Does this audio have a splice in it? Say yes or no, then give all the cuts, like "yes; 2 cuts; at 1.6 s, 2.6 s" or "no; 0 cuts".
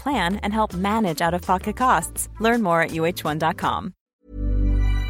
yes; 1 cut; at 4.1 s